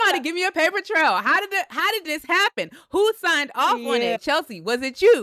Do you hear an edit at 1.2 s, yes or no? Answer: no